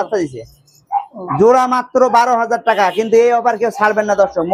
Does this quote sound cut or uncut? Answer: uncut